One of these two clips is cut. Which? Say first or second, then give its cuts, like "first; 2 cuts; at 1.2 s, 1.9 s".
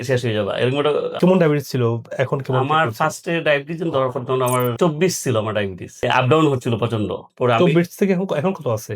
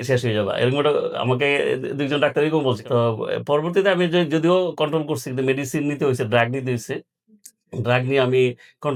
first; 3 cuts; at 1.1 s, 5.8 s, 7.3 s